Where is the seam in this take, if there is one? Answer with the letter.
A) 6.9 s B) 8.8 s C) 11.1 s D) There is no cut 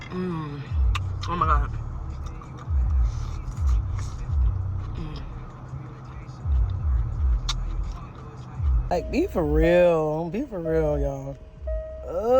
B